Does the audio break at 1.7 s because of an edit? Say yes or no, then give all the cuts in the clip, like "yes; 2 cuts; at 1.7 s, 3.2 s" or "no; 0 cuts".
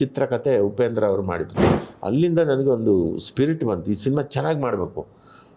yes; 1 cut; at 1.7 s